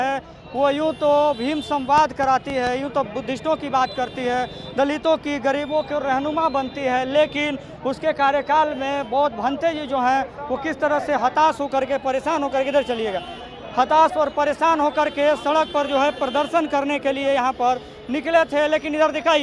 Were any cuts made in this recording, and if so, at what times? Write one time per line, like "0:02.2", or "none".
none